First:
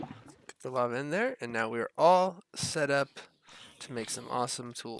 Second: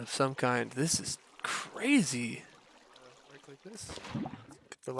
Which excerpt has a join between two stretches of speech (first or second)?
second